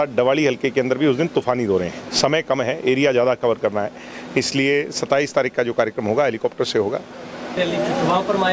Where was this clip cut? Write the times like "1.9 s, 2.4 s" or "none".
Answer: 7.6 s